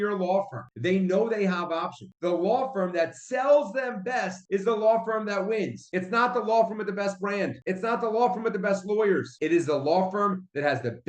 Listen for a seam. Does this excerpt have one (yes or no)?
yes